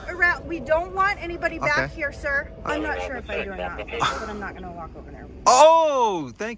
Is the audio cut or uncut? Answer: cut